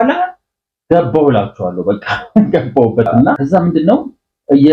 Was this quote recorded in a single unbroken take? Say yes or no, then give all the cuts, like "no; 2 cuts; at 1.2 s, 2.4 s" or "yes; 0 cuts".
no; 1 cut; at 3.4 s